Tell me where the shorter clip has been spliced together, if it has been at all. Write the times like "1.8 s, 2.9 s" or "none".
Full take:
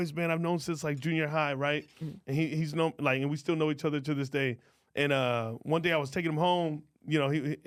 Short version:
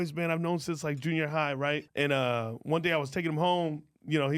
1.9 s